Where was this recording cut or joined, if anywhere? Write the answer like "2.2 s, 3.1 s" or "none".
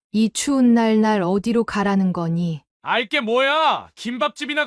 2.7 s